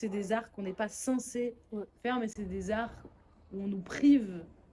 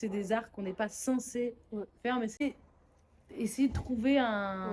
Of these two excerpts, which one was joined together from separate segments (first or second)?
second